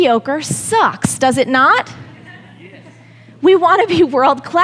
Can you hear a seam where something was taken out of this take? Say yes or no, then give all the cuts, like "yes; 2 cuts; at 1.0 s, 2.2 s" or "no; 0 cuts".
no; 0 cuts